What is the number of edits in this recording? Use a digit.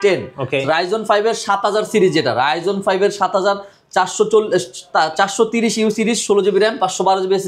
0